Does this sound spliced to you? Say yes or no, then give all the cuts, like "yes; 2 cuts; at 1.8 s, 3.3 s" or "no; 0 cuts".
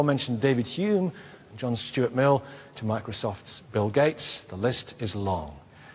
no; 0 cuts